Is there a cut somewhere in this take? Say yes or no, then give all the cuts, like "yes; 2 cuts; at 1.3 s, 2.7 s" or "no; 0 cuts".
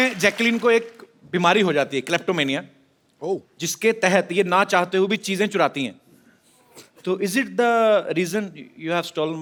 no; 0 cuts